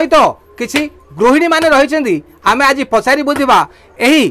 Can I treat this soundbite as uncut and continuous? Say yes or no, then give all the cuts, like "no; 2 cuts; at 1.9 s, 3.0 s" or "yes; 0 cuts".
yes; 0 cuts